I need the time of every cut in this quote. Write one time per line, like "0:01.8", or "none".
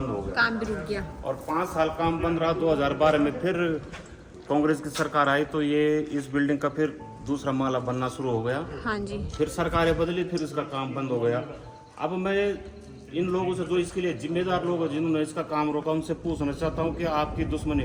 none